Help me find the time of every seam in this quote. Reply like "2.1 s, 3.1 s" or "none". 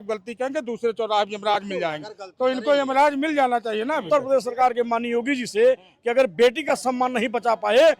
4.0 s